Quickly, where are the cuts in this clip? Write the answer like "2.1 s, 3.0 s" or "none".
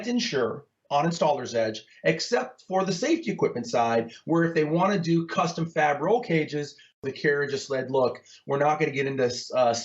7.0 s